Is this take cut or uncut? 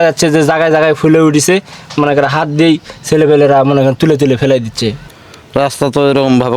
cut